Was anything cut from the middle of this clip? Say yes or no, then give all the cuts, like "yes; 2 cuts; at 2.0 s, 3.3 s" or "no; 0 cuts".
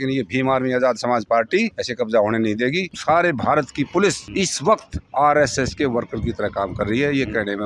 yes; 3 cuts; at 1.8 s, 2.9 s, 4.5 s